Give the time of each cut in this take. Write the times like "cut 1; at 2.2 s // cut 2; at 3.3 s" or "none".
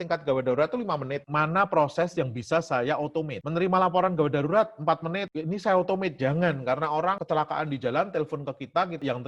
cut 1; at 1.2 s // cut 2; at 7.2 s